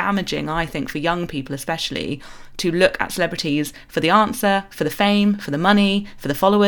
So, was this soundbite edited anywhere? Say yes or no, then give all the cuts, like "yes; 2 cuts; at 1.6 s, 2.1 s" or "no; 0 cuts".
no; 0 cuts